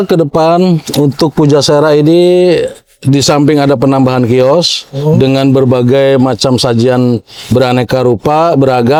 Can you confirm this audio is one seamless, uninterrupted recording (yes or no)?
yes